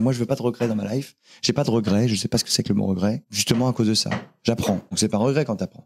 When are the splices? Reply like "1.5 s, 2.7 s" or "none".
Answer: 3.3 s, 4.9 s